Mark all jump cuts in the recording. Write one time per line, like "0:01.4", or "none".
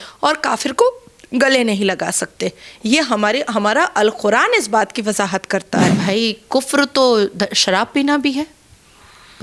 0:06.0